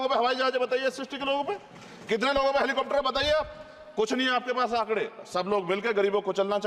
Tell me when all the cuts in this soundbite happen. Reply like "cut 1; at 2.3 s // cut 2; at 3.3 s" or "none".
none